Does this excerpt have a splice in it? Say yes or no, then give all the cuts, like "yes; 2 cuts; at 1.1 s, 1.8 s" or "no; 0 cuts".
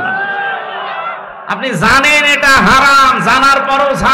yes; 1 cut; at 1.3 s